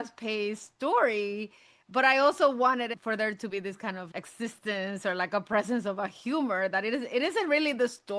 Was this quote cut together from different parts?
yes; 2 cuts; at 3.0 s, 4.1 s

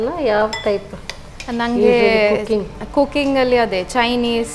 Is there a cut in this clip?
no; 0 cuts

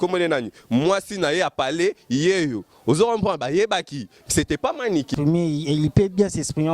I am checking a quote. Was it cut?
yes; 1 cut; at 5.1 s

